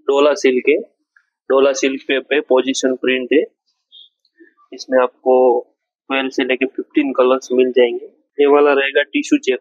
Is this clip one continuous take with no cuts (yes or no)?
no